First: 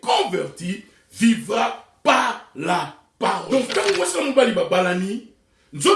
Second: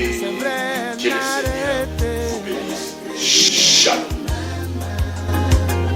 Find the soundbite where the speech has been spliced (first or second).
first